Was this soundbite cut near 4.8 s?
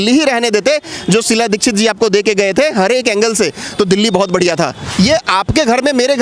yes; 1 cut; at 4.8 s

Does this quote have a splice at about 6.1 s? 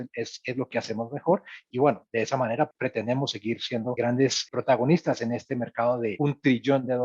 yes; 4 cuts; at 1.6 s, 2.7 s, 4.2 s, 6.1 s

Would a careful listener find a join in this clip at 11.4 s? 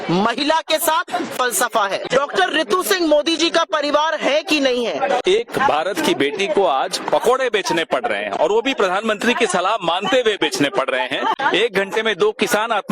yes; 3 cuts; at 2.1 s, 5.2 s, 11.4 s

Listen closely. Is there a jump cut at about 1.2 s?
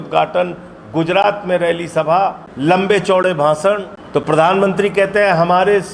no; 2 cuts; at 2.5 s, 3.9 s

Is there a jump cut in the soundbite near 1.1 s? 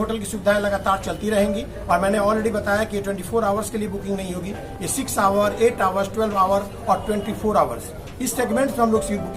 no; 0 cuts

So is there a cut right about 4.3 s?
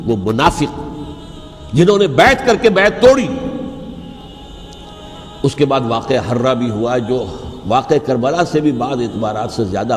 yes; 1 cut; at 4.3 s

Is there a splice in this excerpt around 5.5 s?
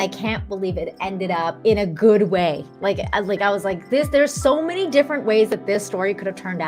no; 1 cut; at 1.6 s

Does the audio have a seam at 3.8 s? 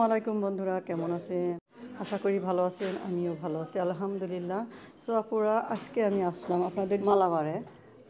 no; 2 cuts; at 1.7 s, 7.0 s

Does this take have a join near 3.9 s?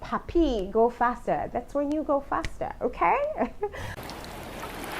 yes; 1 cut; at 3.9 s

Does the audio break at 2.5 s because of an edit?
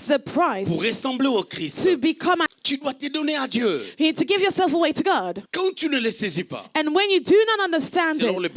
yes; 1 cut; at 2.5 s

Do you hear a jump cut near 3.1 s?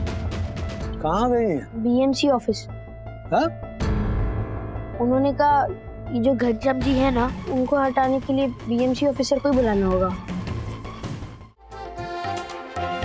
no; 1 cut; at 11.7 s

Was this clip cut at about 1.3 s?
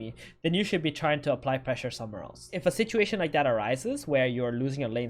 no; 1 cut; at 2.6 s

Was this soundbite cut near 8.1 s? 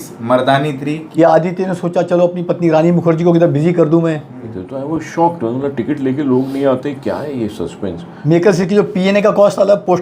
yes; 3 cuts; at 1.0 s, 4.5 s, 8.1 s

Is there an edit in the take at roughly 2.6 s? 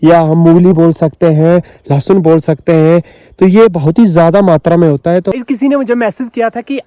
no; 1 cut; at 5.3 s

